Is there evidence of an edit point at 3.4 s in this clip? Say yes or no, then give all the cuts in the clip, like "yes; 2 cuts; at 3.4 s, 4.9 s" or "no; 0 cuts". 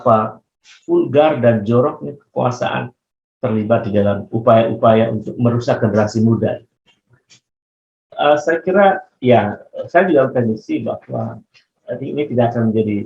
no; 1 cut; at 8.0 s